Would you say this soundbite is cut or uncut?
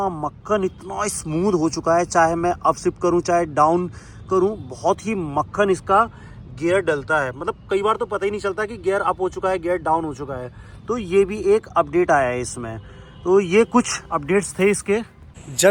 uncut